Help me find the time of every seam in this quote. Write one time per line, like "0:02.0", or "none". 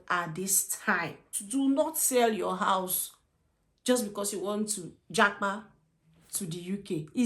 0:01.3